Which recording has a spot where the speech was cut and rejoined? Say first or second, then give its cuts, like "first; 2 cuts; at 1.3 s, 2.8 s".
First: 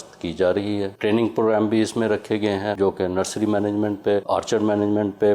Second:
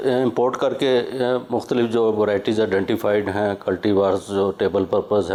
first; 3 cuts; at 0.9 s, 2.8 s, 4.2 s